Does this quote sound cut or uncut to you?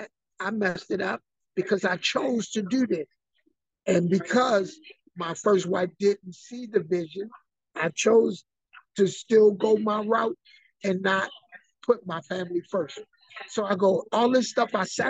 uncut